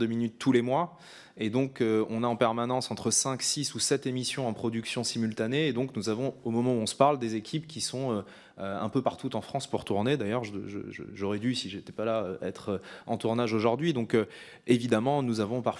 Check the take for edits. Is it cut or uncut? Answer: uncut